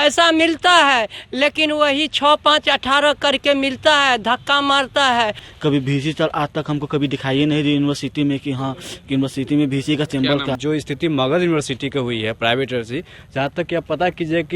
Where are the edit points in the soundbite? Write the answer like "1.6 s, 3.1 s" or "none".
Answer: 5.5 s, 10.6 s